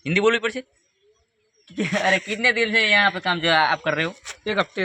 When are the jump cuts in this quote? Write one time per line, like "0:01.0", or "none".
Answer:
none